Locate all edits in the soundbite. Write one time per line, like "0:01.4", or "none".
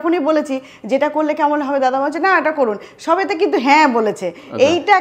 none